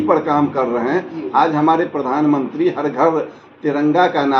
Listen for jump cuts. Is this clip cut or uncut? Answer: uncut